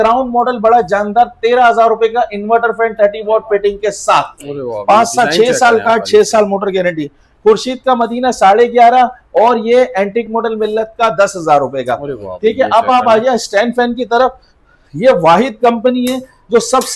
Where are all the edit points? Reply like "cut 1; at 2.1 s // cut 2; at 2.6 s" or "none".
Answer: none